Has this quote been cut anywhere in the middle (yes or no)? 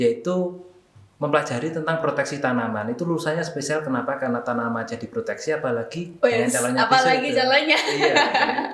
no